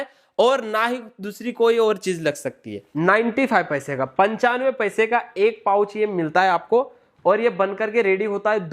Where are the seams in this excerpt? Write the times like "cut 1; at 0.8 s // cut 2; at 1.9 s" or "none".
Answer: cut 1; at 2.8 s